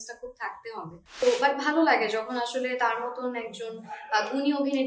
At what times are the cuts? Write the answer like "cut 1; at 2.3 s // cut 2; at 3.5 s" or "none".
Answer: cut 1; at 1.2 s